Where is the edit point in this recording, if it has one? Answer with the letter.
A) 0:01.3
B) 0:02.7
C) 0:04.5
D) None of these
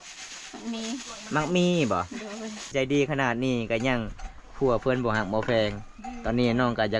B